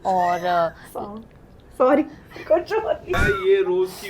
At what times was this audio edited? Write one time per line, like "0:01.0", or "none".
0:03.1